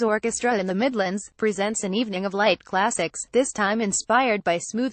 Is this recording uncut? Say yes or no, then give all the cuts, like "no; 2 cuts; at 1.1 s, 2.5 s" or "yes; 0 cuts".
no; 1 cut; at 0.9 s